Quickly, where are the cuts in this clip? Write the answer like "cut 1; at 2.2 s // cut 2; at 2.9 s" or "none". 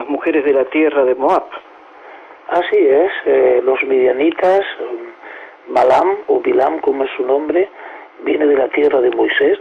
cut 1; at 6.7 s